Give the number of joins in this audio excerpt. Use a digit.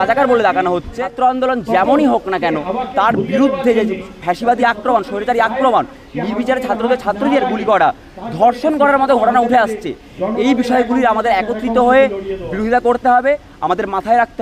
1